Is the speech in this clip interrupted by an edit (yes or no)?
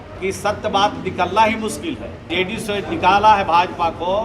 yes